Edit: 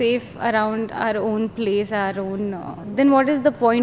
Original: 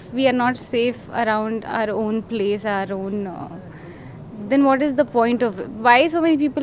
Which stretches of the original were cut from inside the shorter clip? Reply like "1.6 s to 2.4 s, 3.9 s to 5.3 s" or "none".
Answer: 3.5 s to 4.3 s